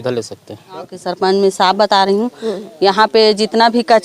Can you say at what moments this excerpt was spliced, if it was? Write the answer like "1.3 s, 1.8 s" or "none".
1.0 s